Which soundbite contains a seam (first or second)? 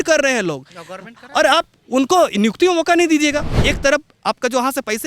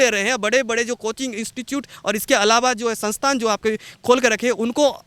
first